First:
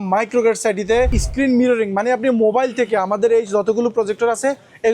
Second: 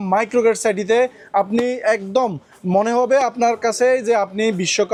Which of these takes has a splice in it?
first; 1 cut; at 1.2 s

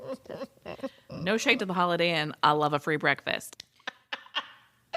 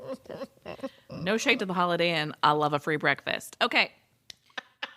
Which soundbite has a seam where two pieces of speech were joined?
first; 1 cut; at 3.5 s

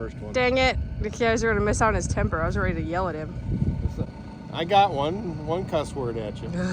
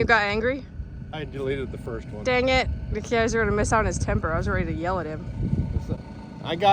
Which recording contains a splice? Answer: second; 1 cut; at 1.0 s

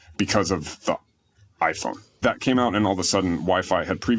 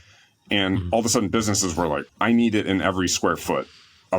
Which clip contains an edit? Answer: second; 1 cut; at 2.1 s

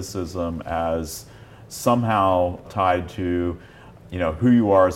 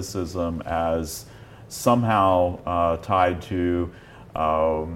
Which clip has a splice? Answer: first; 2 cuts; at 2.7 s, 3.9 s

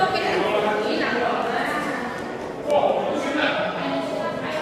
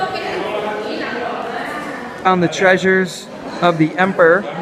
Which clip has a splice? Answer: first; 1 cut; at 2.2 s

